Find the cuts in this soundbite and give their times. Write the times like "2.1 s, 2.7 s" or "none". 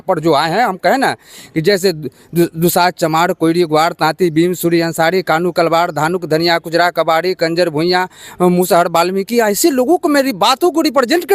2.5 s